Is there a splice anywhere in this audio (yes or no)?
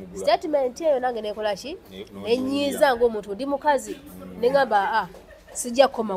no